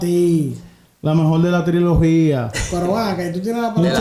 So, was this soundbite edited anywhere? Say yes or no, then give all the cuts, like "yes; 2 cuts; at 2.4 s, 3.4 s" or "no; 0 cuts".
no; 0 cuts